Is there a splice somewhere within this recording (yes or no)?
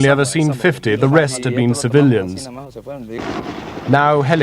no